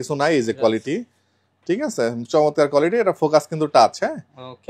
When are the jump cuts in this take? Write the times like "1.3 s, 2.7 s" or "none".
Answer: none